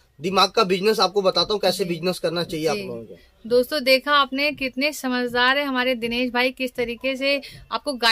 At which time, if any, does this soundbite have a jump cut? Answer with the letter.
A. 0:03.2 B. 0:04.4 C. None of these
C